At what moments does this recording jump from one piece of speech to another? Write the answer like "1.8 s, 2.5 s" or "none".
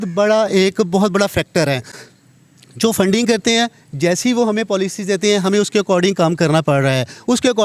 none